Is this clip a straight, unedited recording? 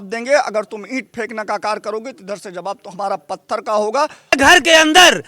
no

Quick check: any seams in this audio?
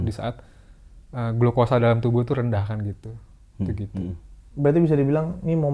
no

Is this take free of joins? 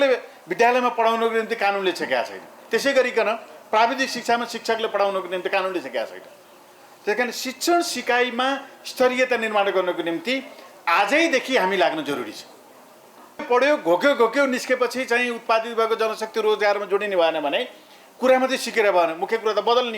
no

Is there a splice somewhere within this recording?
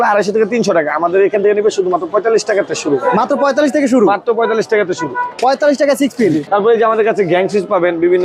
no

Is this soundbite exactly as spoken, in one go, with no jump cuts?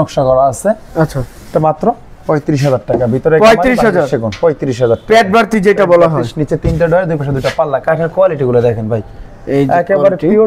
yes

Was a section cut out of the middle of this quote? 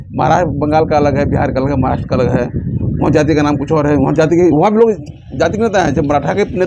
no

